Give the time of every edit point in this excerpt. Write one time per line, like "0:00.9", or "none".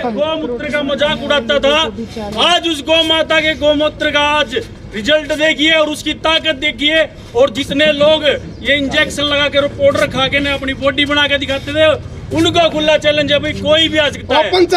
none